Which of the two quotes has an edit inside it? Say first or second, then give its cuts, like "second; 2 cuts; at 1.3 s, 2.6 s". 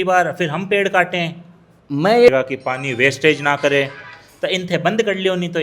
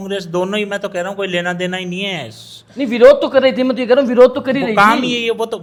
first; 1 cut; at 2.3 s